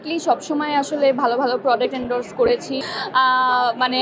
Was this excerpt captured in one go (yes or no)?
no